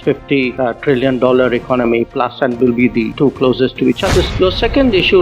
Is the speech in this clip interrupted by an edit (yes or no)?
yes